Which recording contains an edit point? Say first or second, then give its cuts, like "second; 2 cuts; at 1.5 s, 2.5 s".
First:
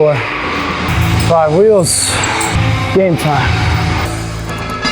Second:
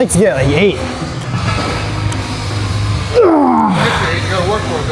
first; 3 cuts; at 0.9 s, 2.6 s, 4.1 s